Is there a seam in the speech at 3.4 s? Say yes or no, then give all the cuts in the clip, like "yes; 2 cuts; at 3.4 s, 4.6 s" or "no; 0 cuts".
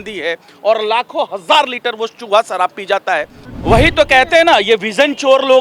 yes; 1 cut; at 3.4 s